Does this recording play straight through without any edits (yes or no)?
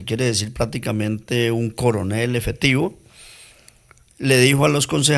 yes